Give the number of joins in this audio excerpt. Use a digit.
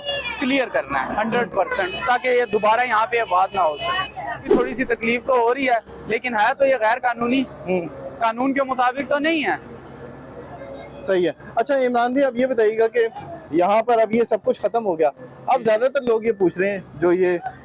0